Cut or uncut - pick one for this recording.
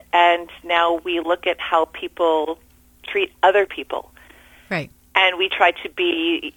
uncut